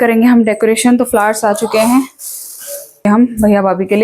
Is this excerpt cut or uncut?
cut